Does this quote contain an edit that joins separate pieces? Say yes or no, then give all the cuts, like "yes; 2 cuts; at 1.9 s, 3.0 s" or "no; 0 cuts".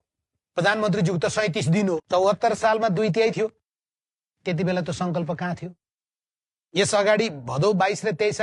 yes; 1 cut; at 2.0 s